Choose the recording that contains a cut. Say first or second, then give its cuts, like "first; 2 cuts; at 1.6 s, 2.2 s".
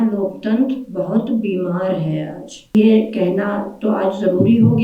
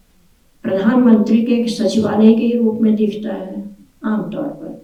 first; 1 cut; at 2.8 s